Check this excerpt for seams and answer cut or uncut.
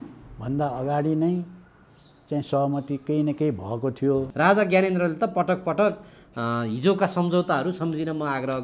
cut